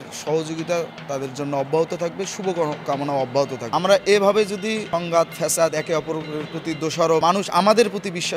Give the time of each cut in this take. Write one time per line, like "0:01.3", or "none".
0:03.6
0:04.8
0:07.2